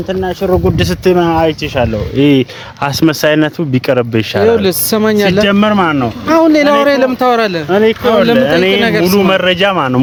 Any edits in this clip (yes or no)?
no